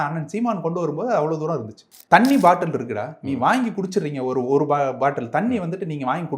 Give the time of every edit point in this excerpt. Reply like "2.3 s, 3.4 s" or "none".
1.9 s